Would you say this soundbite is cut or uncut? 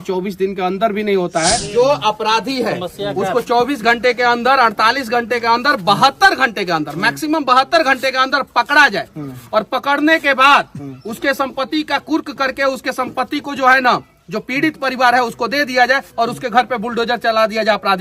cut